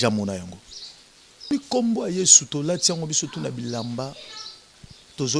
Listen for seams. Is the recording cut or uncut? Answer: cut